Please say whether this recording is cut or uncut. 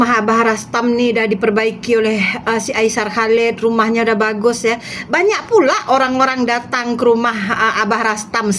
uncut